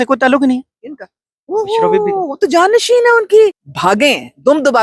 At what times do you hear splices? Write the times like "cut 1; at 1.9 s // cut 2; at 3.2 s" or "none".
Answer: cut 1; at 3.7 s